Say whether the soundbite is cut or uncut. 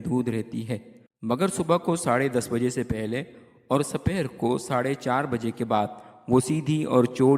uncut